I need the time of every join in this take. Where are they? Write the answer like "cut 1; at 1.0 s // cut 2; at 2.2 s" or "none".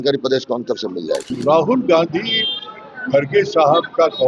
cut 1; at 1.2 s